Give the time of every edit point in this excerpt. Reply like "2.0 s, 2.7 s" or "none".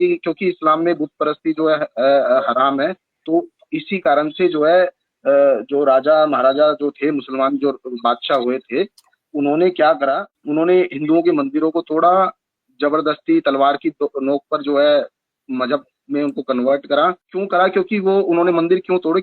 10.3 s, 17.3 s